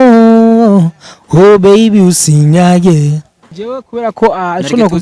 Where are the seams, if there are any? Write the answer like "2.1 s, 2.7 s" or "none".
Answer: 3.5 s